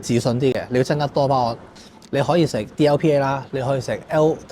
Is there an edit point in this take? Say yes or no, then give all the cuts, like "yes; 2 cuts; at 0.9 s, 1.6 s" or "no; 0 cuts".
yes; 1 cut; at 1.7 s